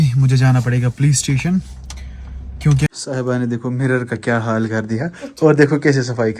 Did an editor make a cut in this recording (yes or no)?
yes